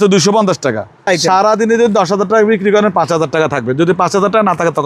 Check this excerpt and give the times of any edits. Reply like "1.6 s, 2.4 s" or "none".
1.0 s

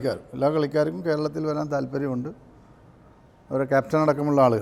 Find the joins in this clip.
none

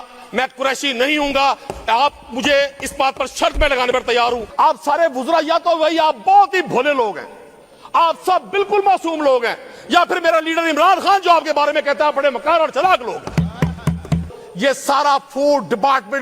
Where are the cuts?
4.5 s, 14.3 s

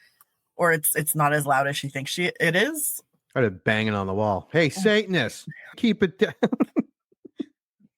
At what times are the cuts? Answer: 5.8 s

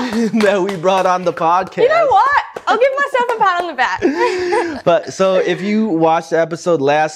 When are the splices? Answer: none

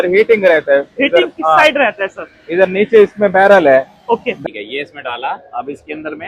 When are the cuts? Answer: 4.3 s

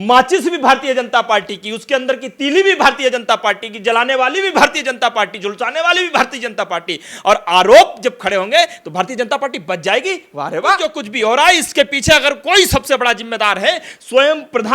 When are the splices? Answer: 11.0 s

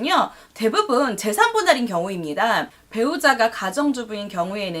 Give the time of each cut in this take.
2.7 s

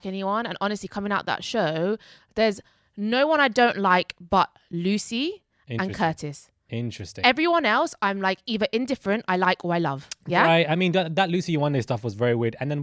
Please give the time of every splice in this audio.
none

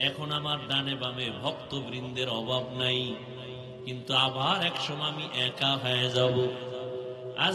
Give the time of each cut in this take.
none

